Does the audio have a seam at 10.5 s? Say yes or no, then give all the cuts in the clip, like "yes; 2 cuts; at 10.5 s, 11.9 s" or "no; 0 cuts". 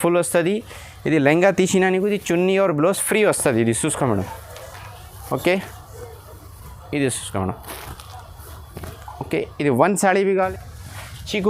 yes; 1 cut; at 10.5 s